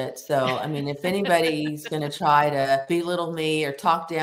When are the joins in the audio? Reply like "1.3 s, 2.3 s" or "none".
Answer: 2.8 s